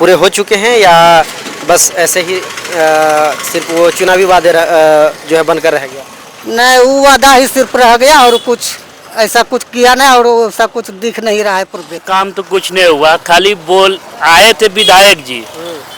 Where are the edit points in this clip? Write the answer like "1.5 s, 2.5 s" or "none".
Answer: 12.0 s